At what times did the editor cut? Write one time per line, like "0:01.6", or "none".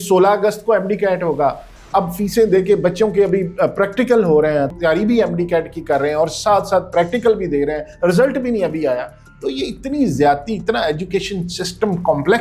0:04.7